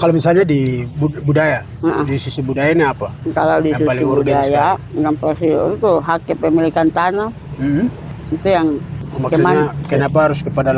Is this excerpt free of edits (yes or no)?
no